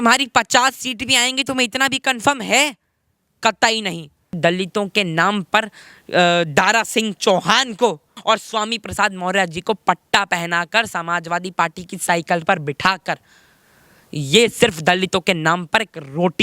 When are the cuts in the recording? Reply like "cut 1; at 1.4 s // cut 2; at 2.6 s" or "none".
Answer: cut 1; at 4.4 s // cut 2; at 8.1 s

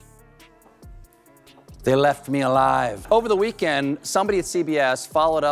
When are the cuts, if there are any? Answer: cut 1; at 2.9 s

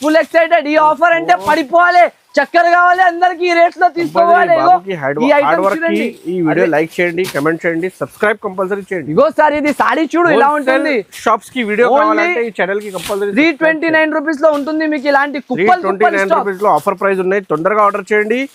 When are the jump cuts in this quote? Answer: none

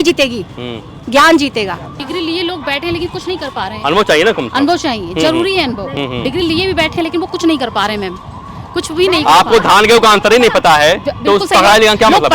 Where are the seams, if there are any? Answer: cut 1; at 2.0 s

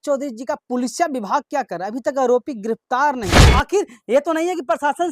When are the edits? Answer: cut 1; at 3.5 s

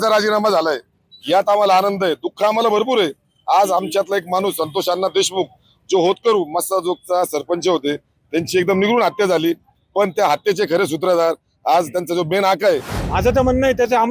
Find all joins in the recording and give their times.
cut 1; at 13.0 s

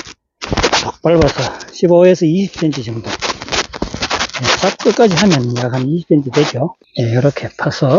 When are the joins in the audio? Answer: cut 1; at 6.8 s

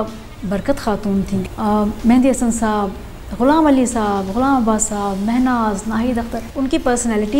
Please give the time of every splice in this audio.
cut 1; at 1.4 s // cut 2; at 6.5 s

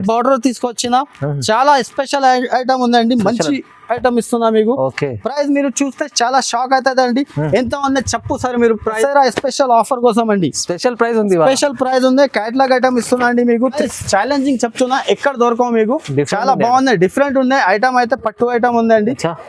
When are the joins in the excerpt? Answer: cut 1; at 8.9 s // cut 2; at 13.8 s

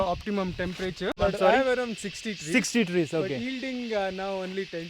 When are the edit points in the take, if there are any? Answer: cut 1; at 1.2 s

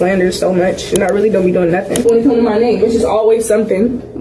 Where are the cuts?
cut 1; at 2.0 s

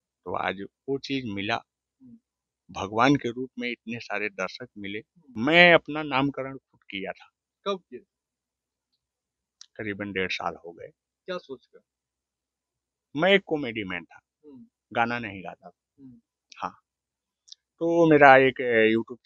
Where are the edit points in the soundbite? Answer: cut 1; at 5.2 s

